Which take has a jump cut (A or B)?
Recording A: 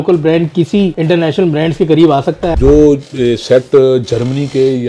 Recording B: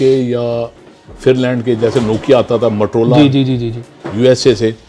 A